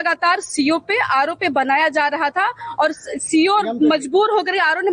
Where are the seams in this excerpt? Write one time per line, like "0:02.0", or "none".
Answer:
none